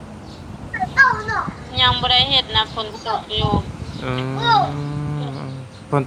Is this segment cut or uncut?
uncut